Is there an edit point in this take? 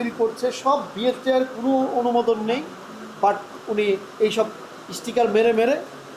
no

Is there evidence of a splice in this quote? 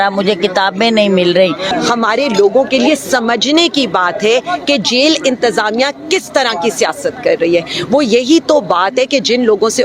yes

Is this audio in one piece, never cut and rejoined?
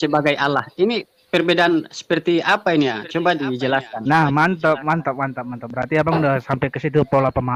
yes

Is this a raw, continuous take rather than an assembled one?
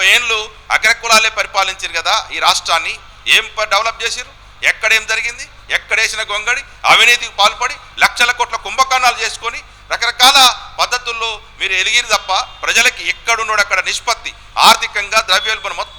yes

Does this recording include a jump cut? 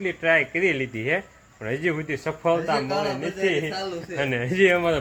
no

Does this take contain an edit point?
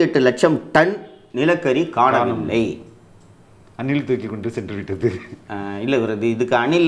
no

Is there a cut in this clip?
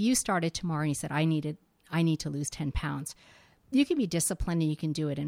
no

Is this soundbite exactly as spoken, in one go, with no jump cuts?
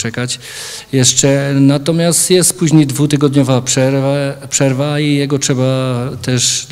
no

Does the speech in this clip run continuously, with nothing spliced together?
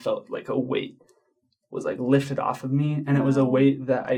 yes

